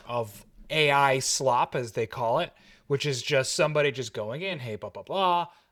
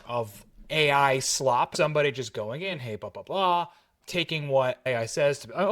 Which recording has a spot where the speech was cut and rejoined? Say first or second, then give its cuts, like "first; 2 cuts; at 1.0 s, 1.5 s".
second; 2 cuts; at 1.7 s, 4.9 s